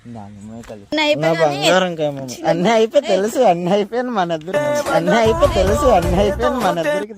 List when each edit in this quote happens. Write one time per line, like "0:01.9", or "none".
0:00.9